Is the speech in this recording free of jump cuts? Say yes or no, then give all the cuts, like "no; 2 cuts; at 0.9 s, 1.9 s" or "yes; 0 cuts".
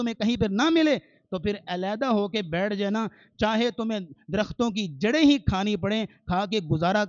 yes; 0 cuts